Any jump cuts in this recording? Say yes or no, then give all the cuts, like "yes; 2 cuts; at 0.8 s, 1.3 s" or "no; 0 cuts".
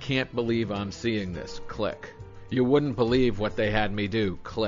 yes; 1 cut; at 2.4 s